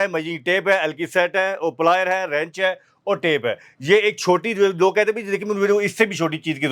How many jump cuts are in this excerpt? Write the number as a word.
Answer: zero